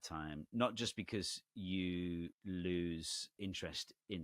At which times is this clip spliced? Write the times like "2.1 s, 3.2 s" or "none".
2.4 s, 3.3 s